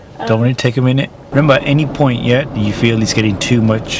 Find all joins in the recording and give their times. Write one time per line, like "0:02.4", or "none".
0:01.2